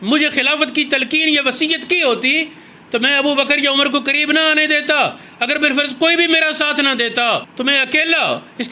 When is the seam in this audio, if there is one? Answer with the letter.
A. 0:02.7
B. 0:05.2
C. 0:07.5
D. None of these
D